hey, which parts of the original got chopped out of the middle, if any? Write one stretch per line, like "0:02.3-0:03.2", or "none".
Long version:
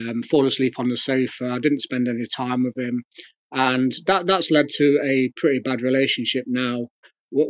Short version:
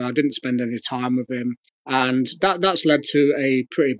0:03.2-0:03.4